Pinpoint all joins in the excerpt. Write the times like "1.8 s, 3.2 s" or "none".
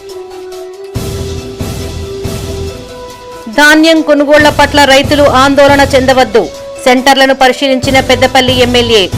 2.7 s